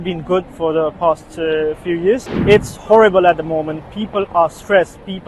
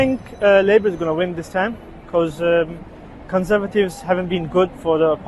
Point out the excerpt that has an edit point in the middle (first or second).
first